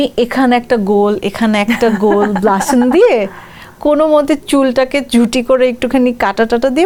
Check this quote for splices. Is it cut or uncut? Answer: uncut